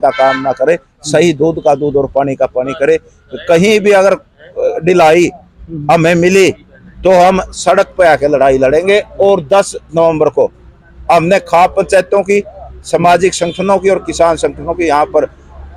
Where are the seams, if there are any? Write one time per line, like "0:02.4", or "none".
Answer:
none